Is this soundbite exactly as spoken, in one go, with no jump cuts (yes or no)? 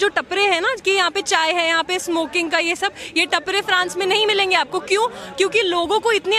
yes